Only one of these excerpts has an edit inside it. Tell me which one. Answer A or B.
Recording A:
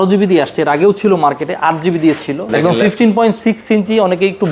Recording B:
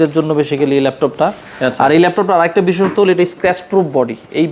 A